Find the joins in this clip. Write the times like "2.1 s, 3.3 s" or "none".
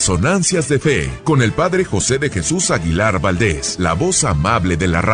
1.1 s, 3.7 s